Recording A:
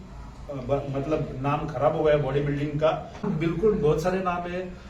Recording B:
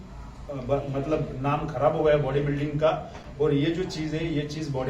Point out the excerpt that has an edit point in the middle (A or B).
A